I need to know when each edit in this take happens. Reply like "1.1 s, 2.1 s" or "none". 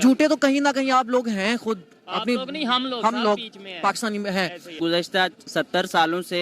4.7 s